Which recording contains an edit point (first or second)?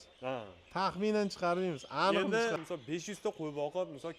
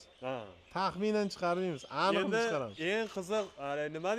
first